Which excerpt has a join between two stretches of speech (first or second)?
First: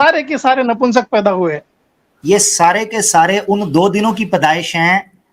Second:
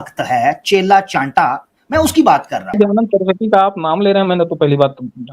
second